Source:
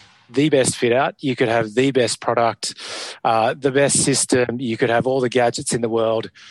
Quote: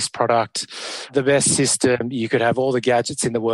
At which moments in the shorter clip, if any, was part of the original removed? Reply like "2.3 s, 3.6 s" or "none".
1.1 s